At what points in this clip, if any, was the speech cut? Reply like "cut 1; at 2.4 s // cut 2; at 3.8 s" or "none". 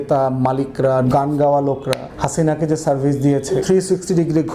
cut 1; at 1.1 s // cut 2; at 3.6 s